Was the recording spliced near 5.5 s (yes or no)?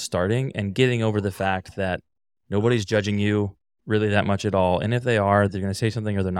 yes